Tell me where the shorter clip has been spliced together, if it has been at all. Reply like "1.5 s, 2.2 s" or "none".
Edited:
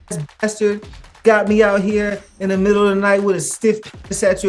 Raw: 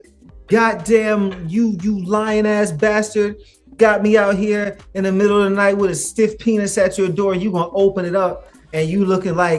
none